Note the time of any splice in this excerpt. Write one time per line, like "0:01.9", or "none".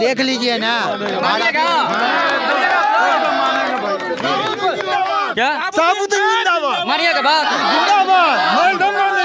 none